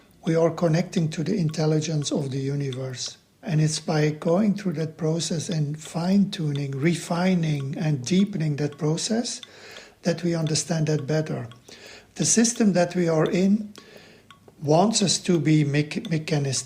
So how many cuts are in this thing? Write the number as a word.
one